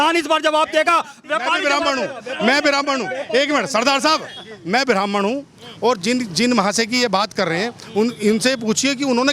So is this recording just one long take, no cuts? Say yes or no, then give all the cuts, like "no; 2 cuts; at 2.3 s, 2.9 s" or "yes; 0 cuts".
yes; 0 cuts